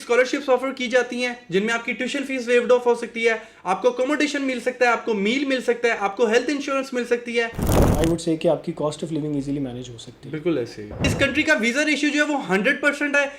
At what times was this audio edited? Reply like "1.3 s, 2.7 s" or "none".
7.8 s, 11.1 s